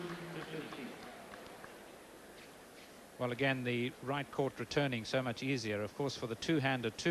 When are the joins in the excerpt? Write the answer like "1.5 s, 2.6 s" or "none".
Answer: 1.7 s

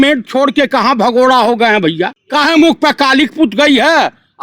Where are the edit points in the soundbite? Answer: 2.2 s

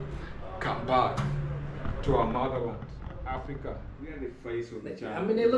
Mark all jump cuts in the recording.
4.1 s

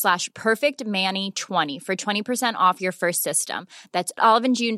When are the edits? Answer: 1.8 s

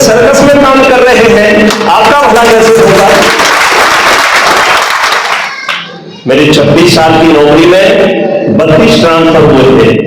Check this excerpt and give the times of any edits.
5.3 s

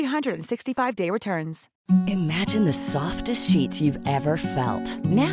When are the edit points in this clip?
1.7 s

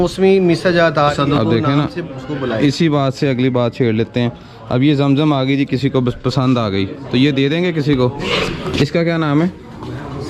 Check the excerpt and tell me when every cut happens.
1.1 s, 8.2 s

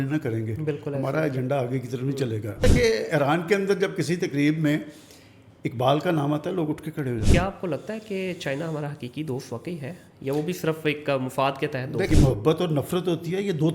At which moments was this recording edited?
2.6 s, 7.3 s, 12.1 s

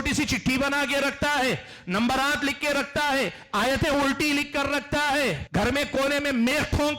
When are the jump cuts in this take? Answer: 5.4 s

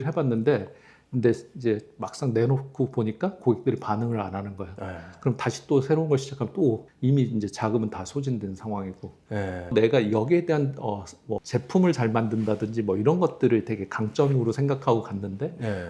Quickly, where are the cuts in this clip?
9.7 s

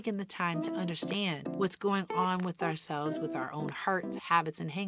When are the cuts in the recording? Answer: 1.5 s

